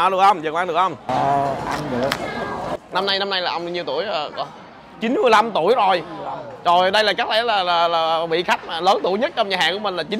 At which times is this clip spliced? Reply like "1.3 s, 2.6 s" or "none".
none